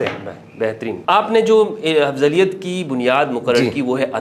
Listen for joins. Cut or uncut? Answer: cut